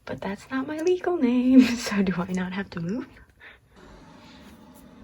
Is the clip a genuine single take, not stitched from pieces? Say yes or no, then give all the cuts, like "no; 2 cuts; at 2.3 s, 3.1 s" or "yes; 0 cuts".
no; 1 cut; at 3.8 s